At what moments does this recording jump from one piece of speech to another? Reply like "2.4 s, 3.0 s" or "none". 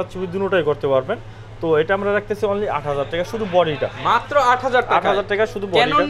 none